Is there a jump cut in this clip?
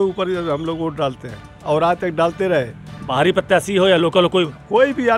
no; 0 cuts

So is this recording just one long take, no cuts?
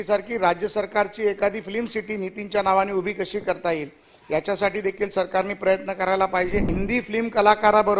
no; 1 cut; at 6.8 s

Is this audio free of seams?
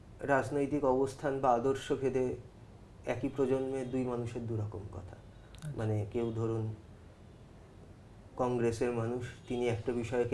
yes; 0 cuts

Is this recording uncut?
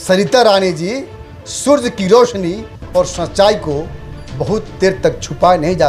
yes; 0 cuts

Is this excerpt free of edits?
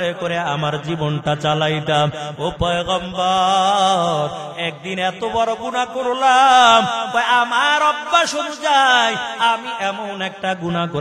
yes; 0 cuts

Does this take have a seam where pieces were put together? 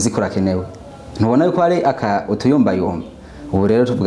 no; 0 cuts

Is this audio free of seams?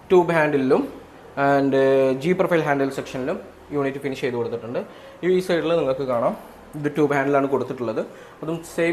yes; 0 cuts

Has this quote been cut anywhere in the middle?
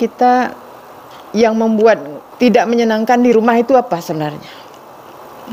yes; 1 cut; at 2.3 s

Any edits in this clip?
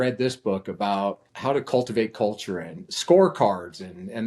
yes; 1 cut; at 1.3 s

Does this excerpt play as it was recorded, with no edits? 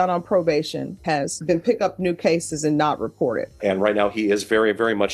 no; 2 cuts; at 1.0 s, 3.5 s

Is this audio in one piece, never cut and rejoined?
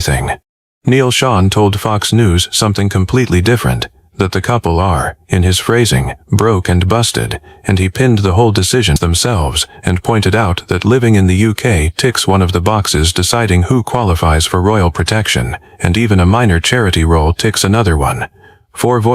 no; 1 cut; at 9.0 s

